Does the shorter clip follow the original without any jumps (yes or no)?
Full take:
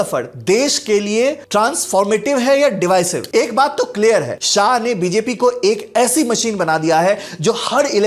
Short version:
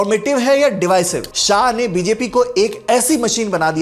no